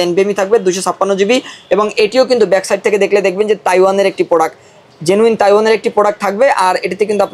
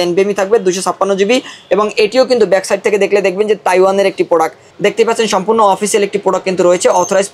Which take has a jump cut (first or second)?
second